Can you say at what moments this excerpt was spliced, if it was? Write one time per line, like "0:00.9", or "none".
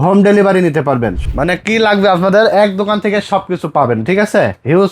0:01.2